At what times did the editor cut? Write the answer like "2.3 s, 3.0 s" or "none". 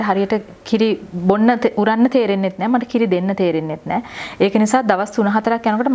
none